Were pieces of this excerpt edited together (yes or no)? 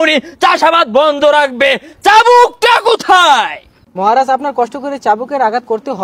no